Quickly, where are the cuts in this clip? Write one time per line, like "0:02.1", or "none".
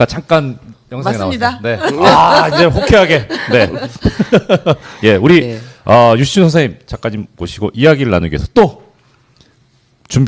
none